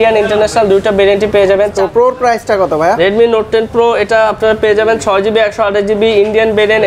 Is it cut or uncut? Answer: cut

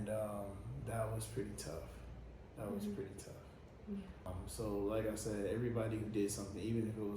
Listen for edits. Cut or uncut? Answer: cut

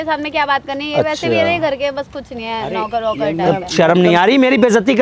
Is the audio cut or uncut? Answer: uncut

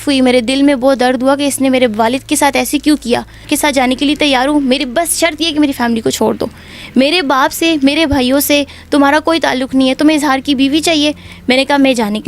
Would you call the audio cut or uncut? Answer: cut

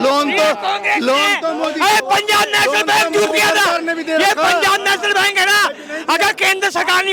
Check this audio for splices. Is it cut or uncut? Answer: uncut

